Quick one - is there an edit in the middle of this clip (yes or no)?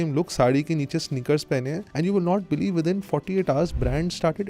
yes